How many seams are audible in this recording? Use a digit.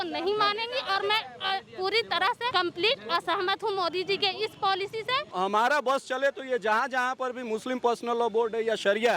2